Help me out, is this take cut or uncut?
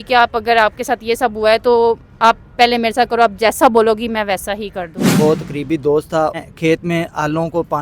cut